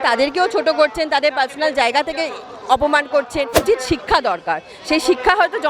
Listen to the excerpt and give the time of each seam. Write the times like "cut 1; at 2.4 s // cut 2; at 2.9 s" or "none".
cut 1; at 3.6 s

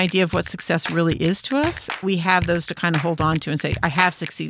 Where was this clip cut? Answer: cut 1; at 2.0 s

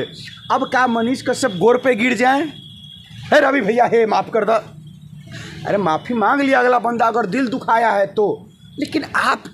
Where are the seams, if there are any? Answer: none

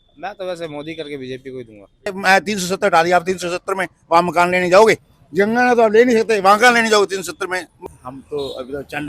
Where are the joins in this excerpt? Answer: cut 1; at 2.1 s // cut 2; at 5.1 s // cut 3; at 7.7 s

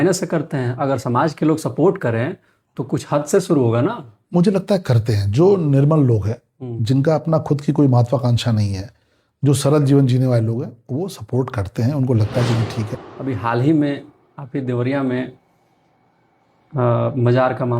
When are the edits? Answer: cut 1; at 12.9 s

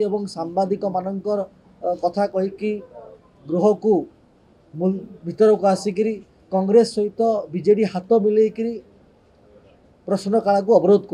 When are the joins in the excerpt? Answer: none

